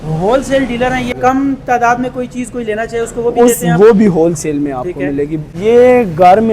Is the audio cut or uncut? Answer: cut